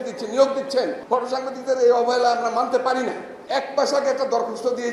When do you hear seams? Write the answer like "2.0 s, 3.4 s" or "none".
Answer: 1.0 s, 3.3 s